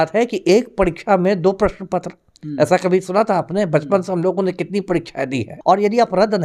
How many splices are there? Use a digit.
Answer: 1